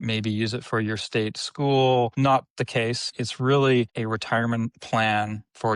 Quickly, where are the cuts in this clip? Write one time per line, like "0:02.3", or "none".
0:02.1
0:03.1
0:03.9

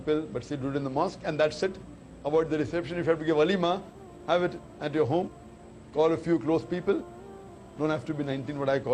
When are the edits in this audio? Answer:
none

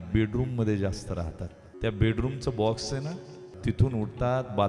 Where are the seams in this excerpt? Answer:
0:01.6
0:03.5

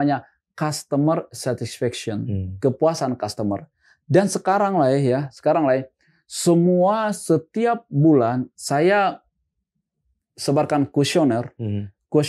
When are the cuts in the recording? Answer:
none

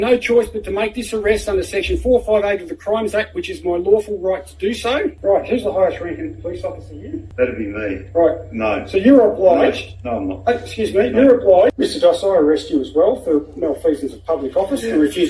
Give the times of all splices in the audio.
0:05.2
0:07.3
0:11.8

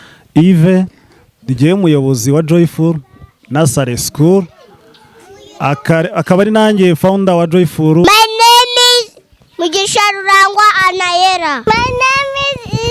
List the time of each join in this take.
0:08.0

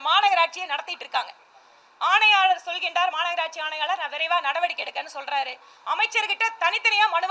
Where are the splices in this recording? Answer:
none

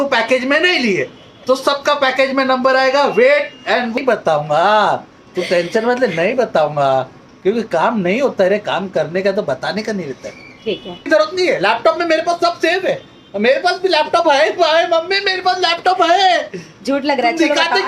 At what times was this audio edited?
0:03.9
0:11.0

